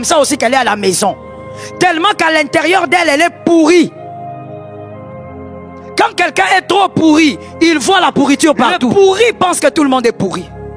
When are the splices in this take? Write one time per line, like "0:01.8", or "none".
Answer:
0:08.9

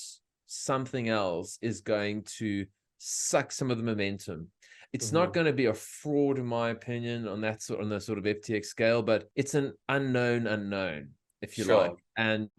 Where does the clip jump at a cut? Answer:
none

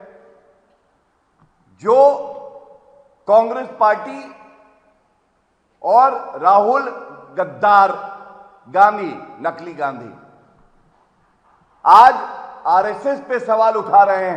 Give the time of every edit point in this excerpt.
none

